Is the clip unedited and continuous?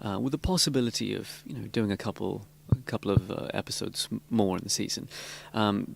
no; 1 cut; at 1.2 s

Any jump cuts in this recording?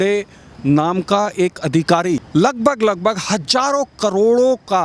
yes; 1 cut; at 2.3 s

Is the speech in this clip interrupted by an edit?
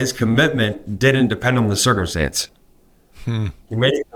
no; 0 cuts

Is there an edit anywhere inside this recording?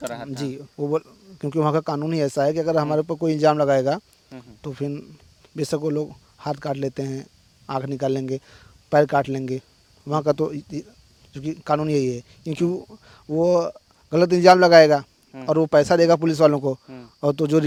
no; 0 cuts

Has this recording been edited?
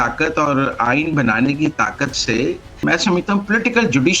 yes; 1 cut; at 2.8 s

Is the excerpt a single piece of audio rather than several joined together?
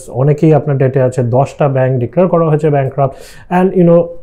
yes; 0 cuts

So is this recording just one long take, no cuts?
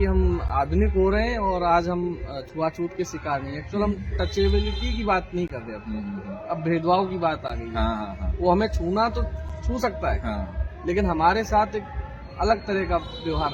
yes; 0 cuts

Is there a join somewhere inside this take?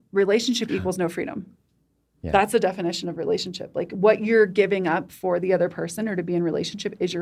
no; 0 cuts

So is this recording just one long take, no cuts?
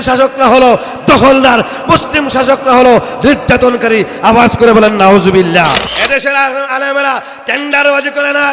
no; 1 cut; at 5.9 s

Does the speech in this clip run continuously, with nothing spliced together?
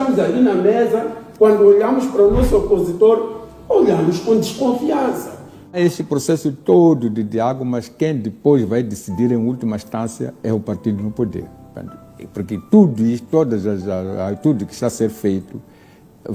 no; 1 cut; at 5.8 s

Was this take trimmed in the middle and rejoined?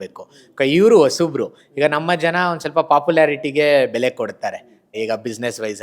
yes; 1 cut; at 4.9 s

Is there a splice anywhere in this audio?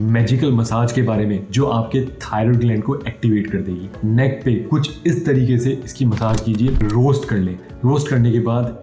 yes; 2 cuts; at 3.9 s, 6.8 s

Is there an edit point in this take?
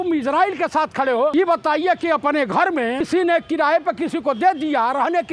yes; 2 cuts; at 1.3 s, 3.1 s

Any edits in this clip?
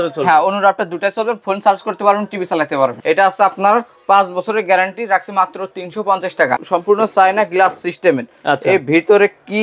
yes; 2 cuts; at 3.0 s, 6.6 s

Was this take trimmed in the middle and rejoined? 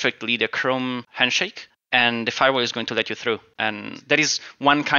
yes; 2 cuts; at 1.2 s, 3.5 s

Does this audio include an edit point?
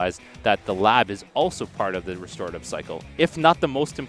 no; 0 cuts

